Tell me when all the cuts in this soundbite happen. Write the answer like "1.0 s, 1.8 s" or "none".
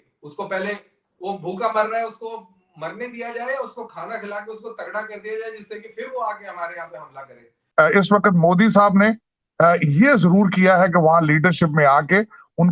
7.5 s